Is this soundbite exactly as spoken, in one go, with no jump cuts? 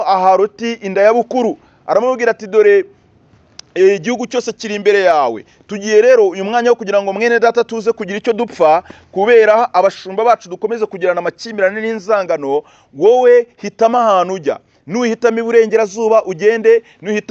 yes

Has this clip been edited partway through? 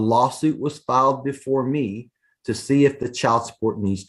no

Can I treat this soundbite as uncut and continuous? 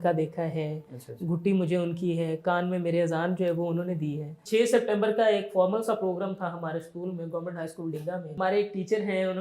no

